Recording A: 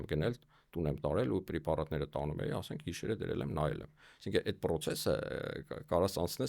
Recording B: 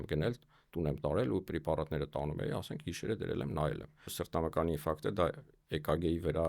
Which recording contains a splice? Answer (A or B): B